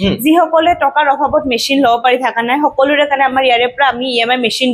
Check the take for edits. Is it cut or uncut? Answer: uncut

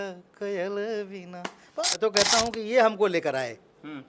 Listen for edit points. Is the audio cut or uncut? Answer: cut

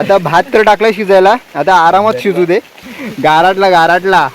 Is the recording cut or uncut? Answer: cut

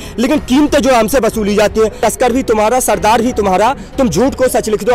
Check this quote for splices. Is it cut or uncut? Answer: cut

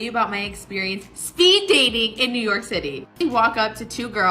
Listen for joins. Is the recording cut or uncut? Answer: cut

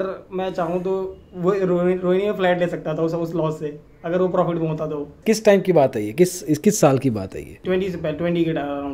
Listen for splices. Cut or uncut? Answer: uncut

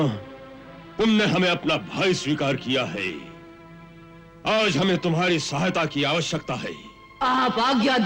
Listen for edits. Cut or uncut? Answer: uncut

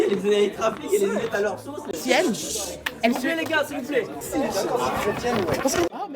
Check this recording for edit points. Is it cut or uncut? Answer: cut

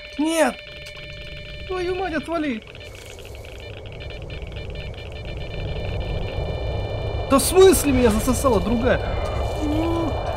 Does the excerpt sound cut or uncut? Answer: uncut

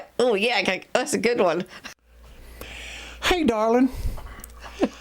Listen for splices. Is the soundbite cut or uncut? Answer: cut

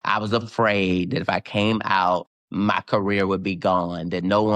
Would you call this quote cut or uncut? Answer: cut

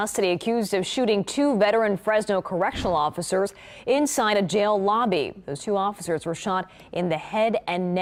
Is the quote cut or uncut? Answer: uncut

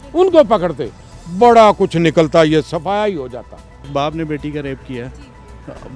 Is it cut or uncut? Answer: cut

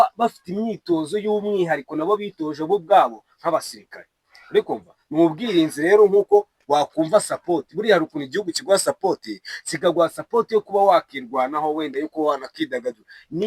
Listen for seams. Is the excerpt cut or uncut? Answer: uncut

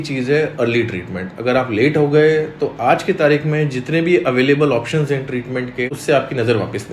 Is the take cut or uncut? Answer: cut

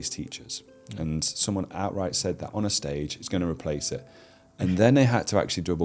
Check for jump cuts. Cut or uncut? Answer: uncut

